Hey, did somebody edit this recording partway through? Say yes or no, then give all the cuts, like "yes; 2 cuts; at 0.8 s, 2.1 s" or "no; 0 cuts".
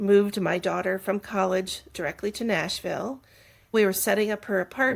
yes; 1 cut; at 3.7 s